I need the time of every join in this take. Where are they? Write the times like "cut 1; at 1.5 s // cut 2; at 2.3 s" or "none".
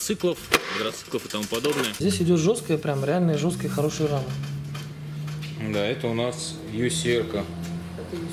cut 1; at 2.0 s

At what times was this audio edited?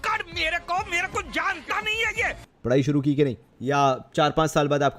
cut 1; at 3.5 s

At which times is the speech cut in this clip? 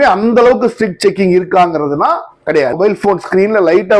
cut 1; at 2.7 s

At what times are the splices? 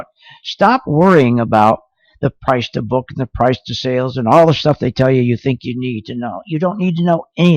none

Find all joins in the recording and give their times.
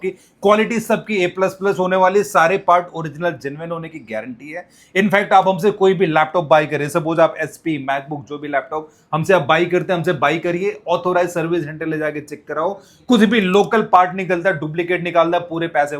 none

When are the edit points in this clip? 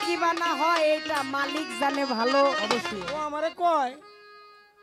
cut 1; at 3.0 s

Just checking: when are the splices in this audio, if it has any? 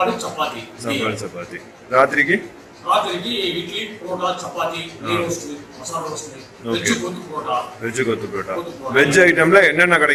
none

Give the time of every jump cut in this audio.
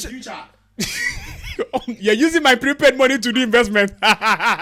none

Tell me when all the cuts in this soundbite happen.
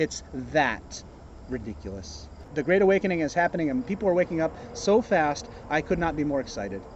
cut 1; at 2.4 s

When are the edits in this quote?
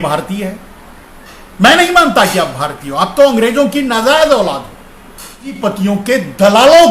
cut 1; at 5.6 s

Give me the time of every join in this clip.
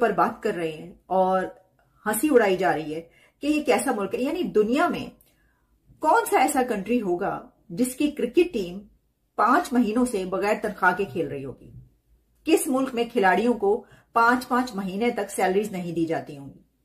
none

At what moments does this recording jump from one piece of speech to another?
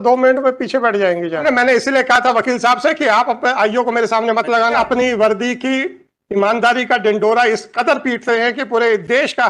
cut 1; at 1.4 s // cut 2; at 4.8 s

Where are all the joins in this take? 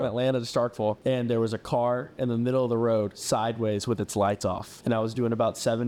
cut 1; at 1.0 s // cut 2; at 4.7 s

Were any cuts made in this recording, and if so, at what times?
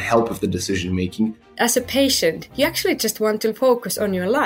cut 1; at 1.4 s // cut 2; at 2.5 s

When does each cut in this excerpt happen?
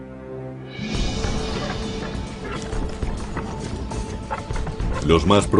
cut 1; at 3.3 s

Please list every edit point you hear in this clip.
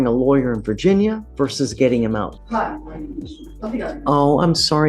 cut 1; at 1.2 s // cut 2; at 2.4 s // cut 3; at 3.4 s

